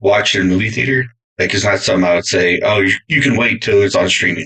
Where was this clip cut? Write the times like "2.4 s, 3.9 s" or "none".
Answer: none